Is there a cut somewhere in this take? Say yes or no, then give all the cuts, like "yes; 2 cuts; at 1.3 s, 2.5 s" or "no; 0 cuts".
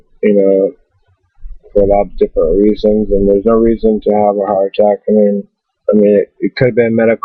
no; 0 cuts